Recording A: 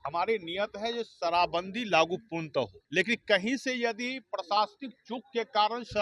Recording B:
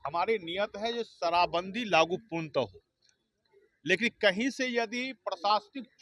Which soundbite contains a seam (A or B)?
A